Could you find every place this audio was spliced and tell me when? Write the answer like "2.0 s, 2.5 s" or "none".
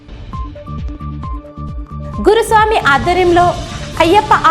1.3 s

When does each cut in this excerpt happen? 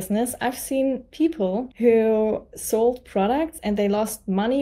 1.7 s

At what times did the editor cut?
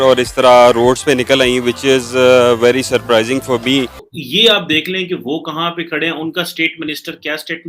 4.0 s

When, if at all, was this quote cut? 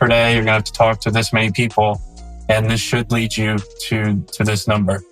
none

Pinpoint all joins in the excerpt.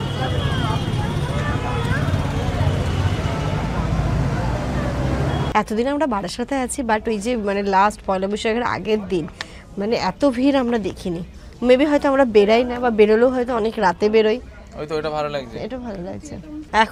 none

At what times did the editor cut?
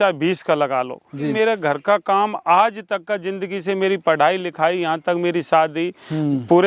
1.1 s

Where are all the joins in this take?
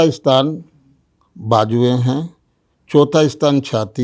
none

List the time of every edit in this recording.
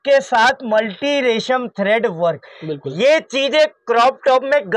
none

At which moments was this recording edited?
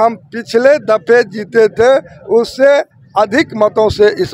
none

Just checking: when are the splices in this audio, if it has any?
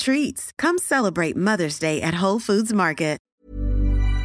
3.2 s

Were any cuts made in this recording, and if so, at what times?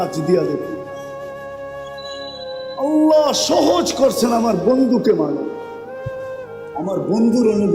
5.5 s, 6.7 s

